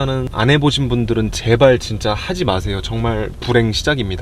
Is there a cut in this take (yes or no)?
no